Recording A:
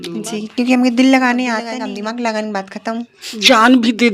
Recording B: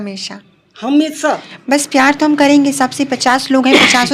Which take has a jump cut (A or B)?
A